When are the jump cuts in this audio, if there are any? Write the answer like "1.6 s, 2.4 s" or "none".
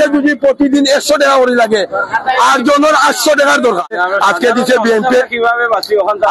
3.9 s